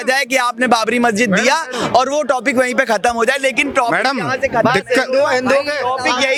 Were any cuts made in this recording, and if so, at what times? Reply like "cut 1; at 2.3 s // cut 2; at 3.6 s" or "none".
none